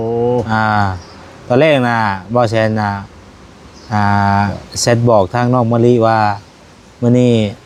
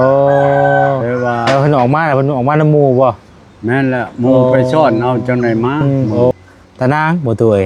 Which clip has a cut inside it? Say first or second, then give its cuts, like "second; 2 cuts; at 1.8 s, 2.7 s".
second; 1 cut; at 6.3 s